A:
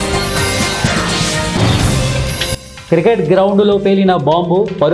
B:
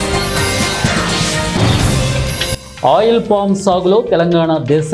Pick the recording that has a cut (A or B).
A